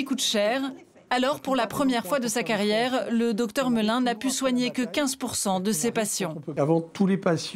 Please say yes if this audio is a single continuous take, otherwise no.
no